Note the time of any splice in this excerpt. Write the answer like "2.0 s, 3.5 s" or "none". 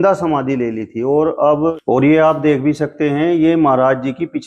1.8 s